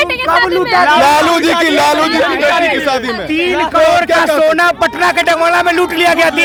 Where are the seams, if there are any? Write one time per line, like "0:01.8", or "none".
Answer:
none

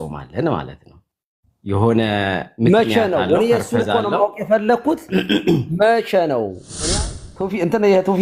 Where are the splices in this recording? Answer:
0:06.9

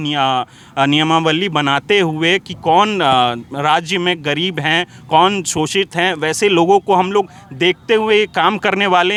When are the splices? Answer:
none

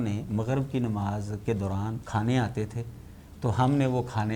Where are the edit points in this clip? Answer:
0:02.0

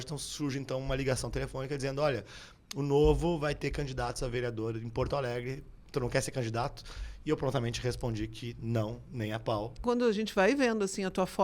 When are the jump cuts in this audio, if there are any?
0:09.8

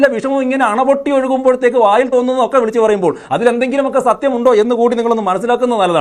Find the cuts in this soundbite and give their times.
none

